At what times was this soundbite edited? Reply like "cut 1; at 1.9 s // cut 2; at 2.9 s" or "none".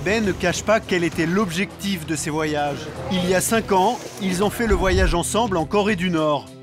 cut 1; at 2.9 s